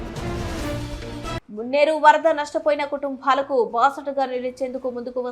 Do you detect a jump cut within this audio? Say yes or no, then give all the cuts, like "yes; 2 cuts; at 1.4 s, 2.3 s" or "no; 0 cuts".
yes; 1 cut; at 1.4 s